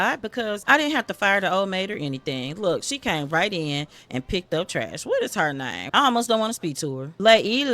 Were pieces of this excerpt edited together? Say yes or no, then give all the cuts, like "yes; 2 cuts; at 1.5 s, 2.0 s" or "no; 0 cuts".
no; 0 cuts